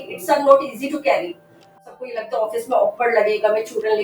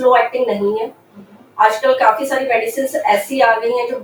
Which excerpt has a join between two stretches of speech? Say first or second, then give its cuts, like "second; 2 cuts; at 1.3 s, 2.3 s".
first; 1 cut; at 1.7 s